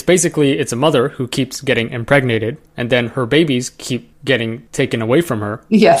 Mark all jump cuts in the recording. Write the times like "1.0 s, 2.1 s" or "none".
none